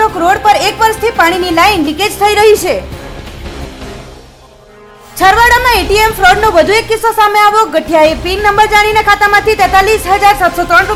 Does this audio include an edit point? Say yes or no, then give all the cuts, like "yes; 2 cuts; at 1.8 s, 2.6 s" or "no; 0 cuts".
no; 0 cuts